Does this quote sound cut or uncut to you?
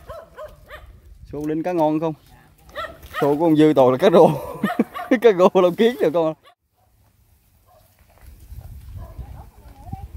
cut